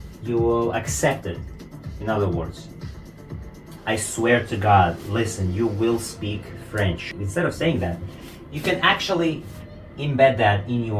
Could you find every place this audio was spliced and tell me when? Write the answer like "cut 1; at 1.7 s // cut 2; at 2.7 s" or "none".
cut 1; at 3.7 s // cut 2; at 7.1 s